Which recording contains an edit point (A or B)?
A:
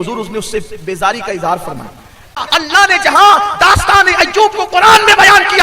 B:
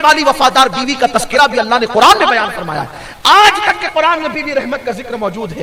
A